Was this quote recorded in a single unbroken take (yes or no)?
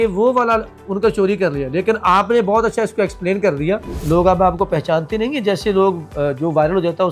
no